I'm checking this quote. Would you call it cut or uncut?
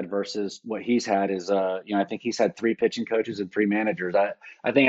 uncut